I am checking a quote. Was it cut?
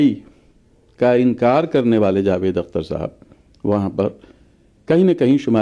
no; 0 cuts

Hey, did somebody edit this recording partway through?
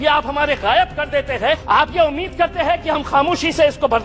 yes; 1 cut; at 1.6 s

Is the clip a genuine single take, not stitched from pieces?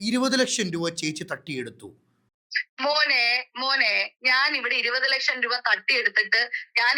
yes; 0 cuts

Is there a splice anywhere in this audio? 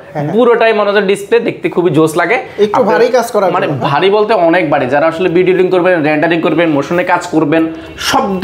no; 0 cuts

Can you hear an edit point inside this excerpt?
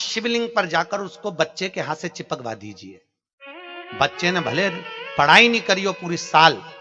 no; 0 cuts

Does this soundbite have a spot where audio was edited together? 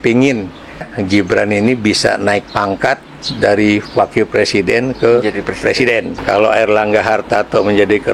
yes; 2 cuts; at 0.9 s, 6.2 s

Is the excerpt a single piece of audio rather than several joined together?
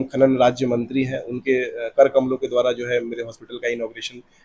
yes; 0 cuts

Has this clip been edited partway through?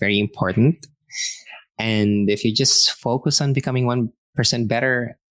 no; 0 cuts

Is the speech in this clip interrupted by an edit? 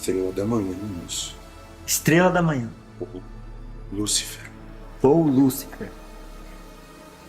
yes; 1 cut; at 5.9 s

